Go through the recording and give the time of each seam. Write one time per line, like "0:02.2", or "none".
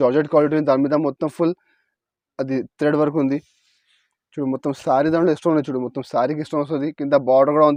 none